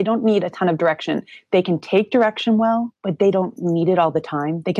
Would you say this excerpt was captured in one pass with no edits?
no; 1 cut; at 3.0 s

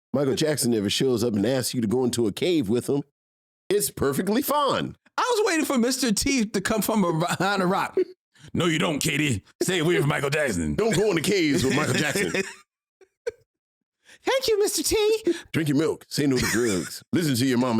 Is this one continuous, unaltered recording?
no; 1 cut; at 15.4 s

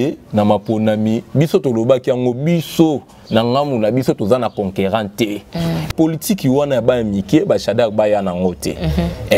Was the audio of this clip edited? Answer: yes; 1 cut; at 5.9 s

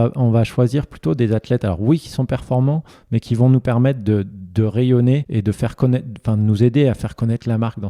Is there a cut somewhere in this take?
yes; 1 cut; at 5.3 s

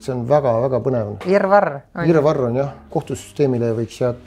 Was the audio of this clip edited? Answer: yes; 1 cut; at 2.9 s

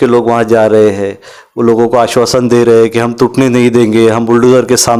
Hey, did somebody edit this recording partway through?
no; 0 cuts

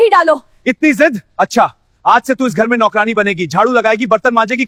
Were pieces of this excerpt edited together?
no; 0 cuts

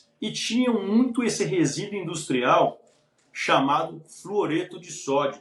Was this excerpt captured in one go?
yes; 0 cuts

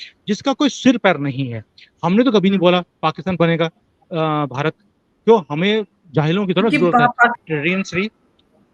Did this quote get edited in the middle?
yes; 1 cut; at 7.4 s

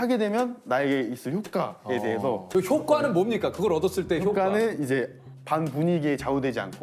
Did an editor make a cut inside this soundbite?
yes; 1 cut; at 2.4 s

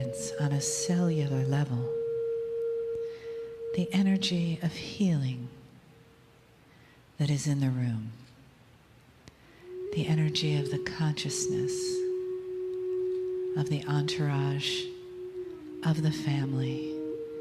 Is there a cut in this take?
yes; 1 cut; at 5.1 s

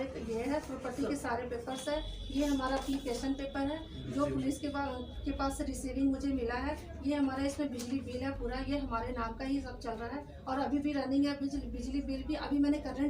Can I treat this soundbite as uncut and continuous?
yes; 0 cuts

